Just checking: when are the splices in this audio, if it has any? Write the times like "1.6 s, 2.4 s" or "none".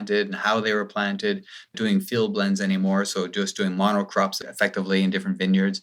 none